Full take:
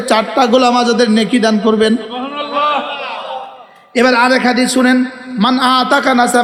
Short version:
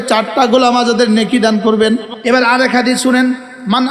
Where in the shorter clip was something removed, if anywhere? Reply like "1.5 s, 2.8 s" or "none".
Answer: 2.1 s